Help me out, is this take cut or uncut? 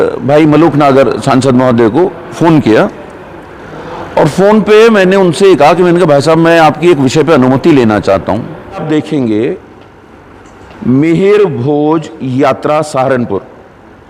cut